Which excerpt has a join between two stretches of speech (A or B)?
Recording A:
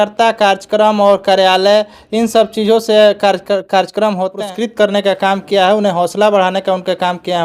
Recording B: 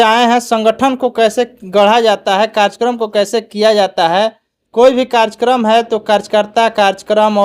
A